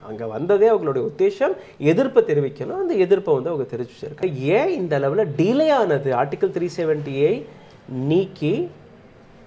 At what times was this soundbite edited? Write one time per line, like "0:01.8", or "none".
0:04.2